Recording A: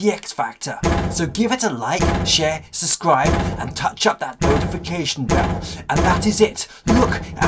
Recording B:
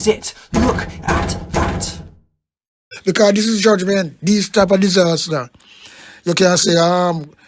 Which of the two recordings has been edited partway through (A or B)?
B